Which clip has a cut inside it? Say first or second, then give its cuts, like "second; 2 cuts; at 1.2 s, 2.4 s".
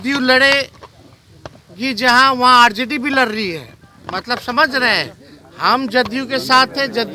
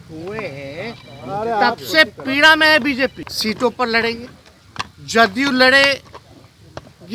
second; 1 cut; at 3.3 s